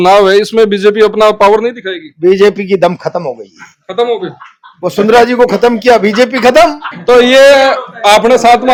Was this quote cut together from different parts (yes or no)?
no